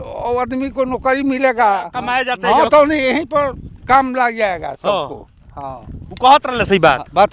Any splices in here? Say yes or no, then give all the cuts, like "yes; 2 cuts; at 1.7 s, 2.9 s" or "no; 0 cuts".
yes; 1 cut; at 2.2 s